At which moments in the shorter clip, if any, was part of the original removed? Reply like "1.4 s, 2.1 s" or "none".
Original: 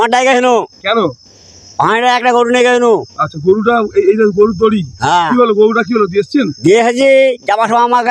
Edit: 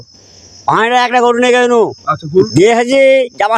2.5 s